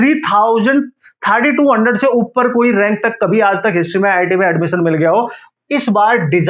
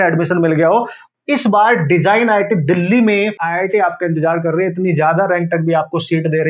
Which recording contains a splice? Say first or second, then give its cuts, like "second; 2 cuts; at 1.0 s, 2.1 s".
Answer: second; 1 cut; at 3.4 s